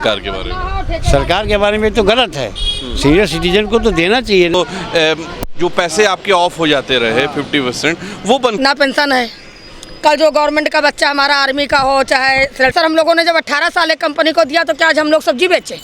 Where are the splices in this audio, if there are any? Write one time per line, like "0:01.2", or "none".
0:04.5
0:08.6
0:12.7

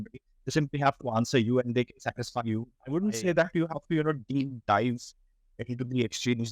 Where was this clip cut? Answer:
0:02.7

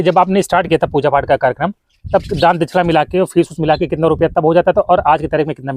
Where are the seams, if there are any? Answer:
none

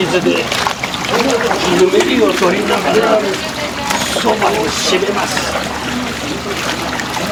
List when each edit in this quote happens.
none

